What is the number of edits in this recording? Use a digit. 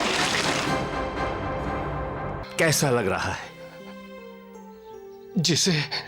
1